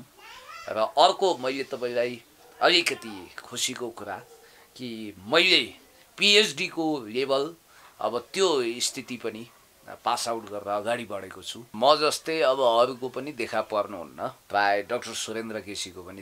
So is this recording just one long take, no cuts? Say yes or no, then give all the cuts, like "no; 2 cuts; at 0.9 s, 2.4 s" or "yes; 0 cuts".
no; 1 cut; at 11.7 s